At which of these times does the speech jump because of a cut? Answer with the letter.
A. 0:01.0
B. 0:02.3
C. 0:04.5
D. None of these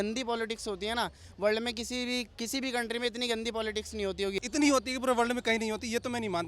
C